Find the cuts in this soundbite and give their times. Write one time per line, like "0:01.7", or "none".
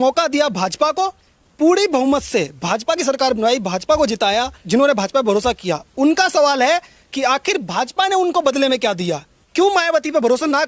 0:04.6
0:09.4